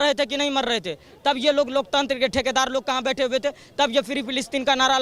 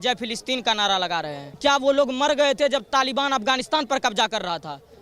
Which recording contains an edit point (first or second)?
second